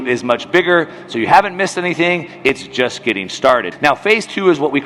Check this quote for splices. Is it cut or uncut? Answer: cut